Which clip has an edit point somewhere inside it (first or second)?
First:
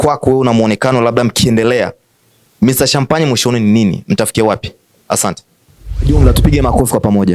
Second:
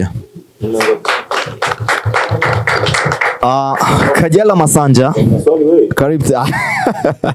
first